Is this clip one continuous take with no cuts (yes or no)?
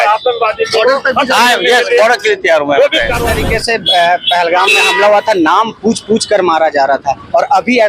no